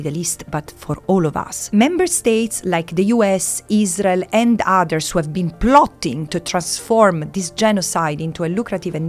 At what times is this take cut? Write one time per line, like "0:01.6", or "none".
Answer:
0:01.5